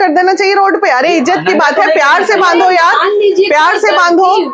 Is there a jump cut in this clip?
no; 0 cuts

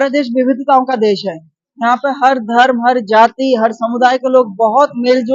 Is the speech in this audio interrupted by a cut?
no; 0 cuts

